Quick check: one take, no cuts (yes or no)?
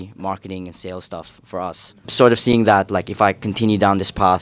no